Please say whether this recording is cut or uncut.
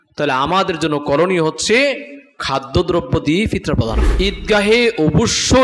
cut